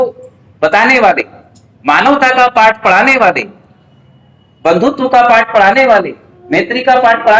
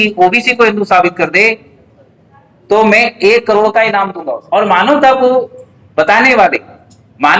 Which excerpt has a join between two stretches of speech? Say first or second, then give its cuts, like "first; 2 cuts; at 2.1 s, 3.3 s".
second; 1 cut; at 4.1 s